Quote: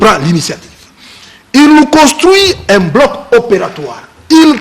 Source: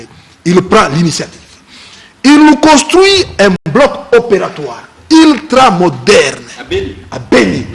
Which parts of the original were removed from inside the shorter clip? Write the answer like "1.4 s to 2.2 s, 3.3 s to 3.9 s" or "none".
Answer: 3.6 s to 3.7 s